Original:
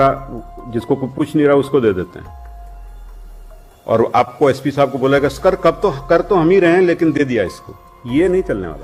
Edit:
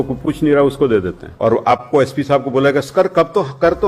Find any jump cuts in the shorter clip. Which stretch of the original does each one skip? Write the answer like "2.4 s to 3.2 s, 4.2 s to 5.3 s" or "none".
2.1 s to 3.7 s